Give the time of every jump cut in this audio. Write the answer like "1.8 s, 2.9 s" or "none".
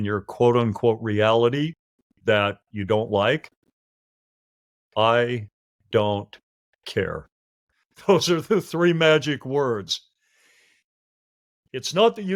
none